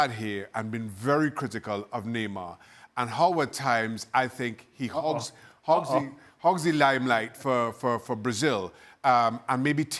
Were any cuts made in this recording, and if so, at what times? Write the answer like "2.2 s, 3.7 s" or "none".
none